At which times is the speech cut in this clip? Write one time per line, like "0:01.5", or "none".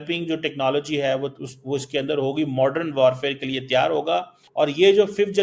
0:04.4